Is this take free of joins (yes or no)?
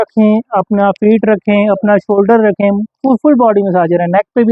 yes